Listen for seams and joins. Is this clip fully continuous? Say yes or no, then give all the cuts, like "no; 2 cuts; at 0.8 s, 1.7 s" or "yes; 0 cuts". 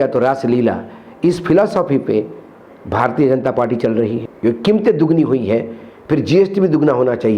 no; 1 cut; at 4.3 s